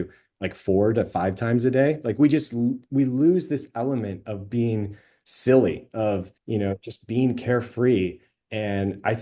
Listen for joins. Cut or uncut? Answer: cut